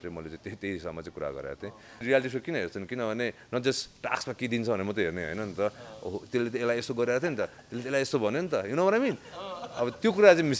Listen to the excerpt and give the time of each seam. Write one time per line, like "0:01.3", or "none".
0:02.0